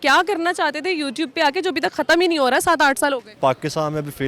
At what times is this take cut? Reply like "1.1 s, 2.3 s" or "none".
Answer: 3.3 s